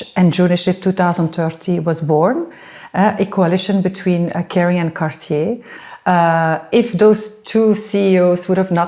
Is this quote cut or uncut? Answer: uncut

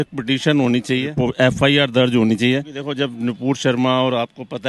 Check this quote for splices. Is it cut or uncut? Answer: cut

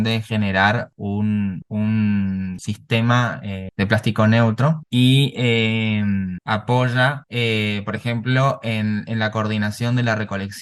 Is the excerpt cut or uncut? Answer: uncut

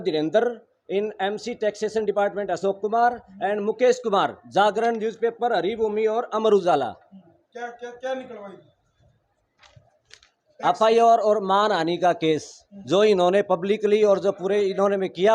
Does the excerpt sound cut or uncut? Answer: uncut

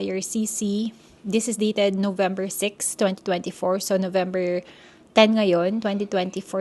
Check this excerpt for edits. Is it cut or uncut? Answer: uncut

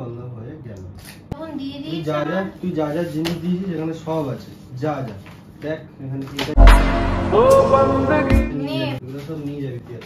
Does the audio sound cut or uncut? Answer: cut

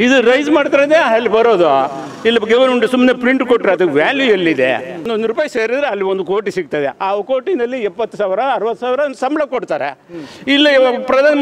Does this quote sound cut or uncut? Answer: cut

